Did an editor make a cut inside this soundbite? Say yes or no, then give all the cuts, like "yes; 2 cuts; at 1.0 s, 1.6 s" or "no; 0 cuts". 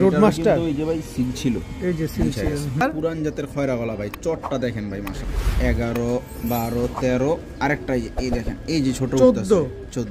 yes; 2 cuts; at 2.8 s, 5.3 s